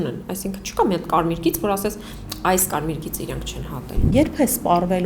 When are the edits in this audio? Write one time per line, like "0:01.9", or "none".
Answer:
0:04.1